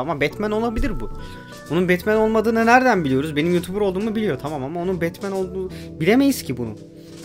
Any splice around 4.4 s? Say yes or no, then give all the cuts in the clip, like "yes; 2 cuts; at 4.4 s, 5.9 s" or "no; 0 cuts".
no; 0 cuts